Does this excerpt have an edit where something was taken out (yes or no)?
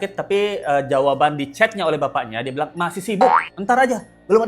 no